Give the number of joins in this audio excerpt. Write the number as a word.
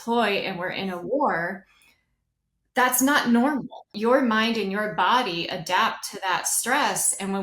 one